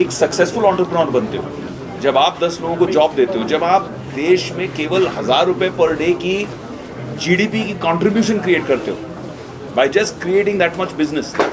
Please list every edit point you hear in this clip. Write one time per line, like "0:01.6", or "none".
none